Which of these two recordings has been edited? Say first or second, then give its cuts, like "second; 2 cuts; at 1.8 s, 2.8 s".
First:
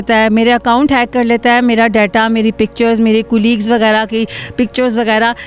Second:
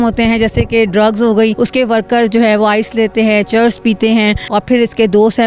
second; 2 cuts; at 1.5 s, 4.4 s